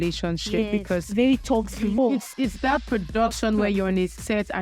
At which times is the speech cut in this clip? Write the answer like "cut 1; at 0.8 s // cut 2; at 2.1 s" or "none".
cut 1; at 2.0 s